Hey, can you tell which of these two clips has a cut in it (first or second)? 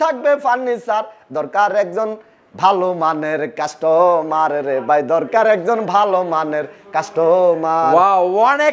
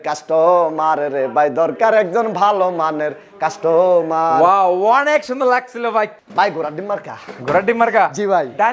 second